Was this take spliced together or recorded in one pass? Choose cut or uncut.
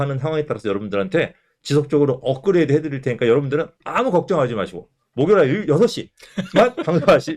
cut